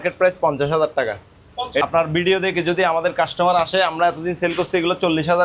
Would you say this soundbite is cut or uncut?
cut